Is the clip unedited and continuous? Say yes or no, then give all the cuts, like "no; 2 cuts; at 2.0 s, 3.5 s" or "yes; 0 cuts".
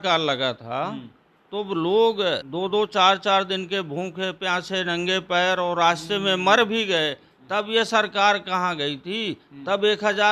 no; 1 cut; at 2.5 s